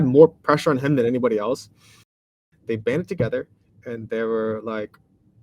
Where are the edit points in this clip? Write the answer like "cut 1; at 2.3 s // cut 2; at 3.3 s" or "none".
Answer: cut 1; at 2.1 s